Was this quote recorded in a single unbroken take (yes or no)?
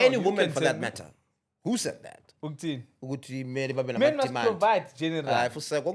yes